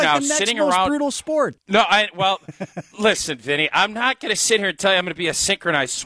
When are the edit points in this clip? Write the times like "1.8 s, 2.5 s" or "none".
1.6 s